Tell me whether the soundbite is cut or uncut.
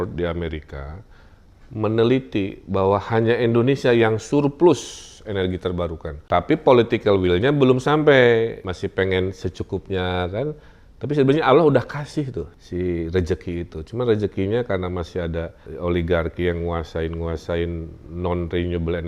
cut